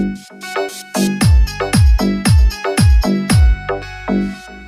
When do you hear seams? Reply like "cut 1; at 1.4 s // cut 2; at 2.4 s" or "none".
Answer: none